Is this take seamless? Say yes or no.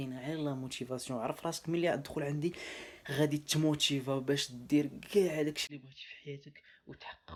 yes